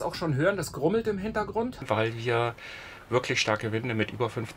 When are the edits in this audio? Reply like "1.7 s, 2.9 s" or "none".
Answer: 1.8 s